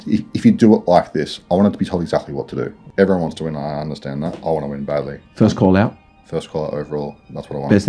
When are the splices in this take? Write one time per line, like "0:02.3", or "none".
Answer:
0:02.8